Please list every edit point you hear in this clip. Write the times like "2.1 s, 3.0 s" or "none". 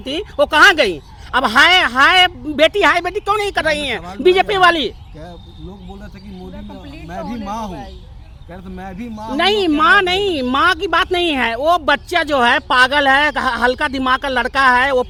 none